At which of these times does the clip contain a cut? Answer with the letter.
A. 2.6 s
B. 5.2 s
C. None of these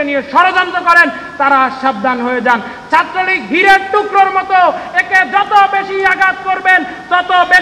C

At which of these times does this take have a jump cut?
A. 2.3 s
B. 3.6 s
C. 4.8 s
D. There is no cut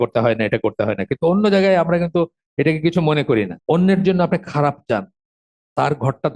B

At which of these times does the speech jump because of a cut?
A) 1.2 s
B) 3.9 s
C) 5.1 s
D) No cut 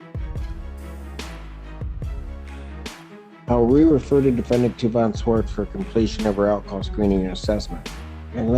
D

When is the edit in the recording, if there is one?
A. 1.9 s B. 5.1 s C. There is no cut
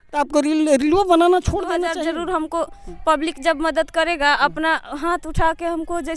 A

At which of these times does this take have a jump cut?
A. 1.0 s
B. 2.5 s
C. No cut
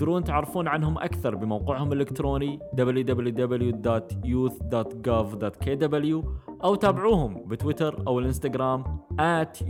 C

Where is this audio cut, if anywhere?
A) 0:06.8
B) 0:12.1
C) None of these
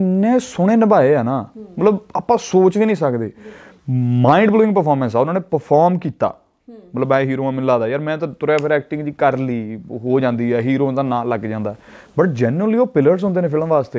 C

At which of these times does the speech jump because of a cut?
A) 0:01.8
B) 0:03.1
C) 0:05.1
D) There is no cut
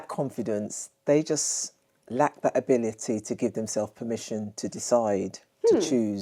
D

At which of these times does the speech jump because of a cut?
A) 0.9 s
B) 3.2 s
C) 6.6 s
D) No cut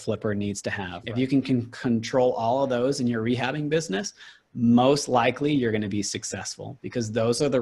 A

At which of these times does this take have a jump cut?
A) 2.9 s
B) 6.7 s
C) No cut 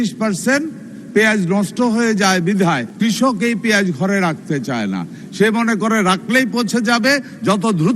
A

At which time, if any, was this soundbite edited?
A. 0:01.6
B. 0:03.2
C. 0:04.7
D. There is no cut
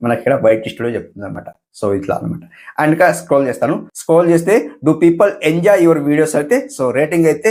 D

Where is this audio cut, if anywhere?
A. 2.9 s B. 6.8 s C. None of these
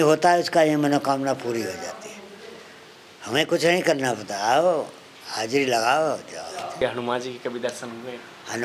B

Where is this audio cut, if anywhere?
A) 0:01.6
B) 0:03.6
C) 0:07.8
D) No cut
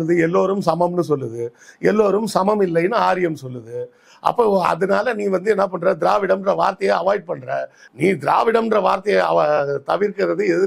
C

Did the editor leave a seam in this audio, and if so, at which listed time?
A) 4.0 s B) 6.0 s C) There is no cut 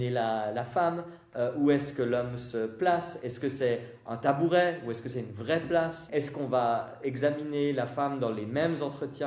B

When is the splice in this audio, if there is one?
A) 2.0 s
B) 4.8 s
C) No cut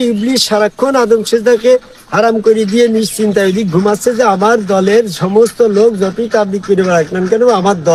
C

